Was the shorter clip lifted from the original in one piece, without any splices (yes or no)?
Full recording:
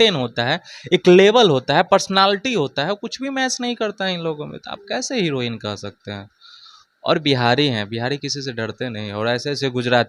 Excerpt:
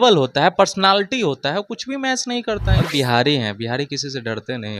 no